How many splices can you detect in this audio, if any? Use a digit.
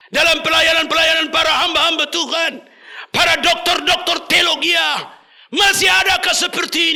0